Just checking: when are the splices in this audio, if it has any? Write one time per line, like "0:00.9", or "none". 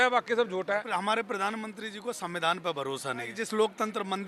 0:00.9
0:03.4

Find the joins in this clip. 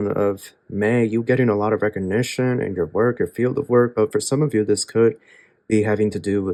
none

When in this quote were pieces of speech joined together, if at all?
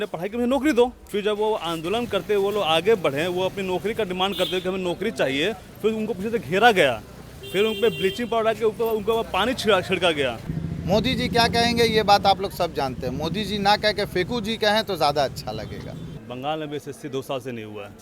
0:01.0
0:10.5
0:16.1

